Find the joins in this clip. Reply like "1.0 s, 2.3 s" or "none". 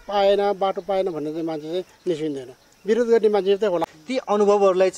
4.0 s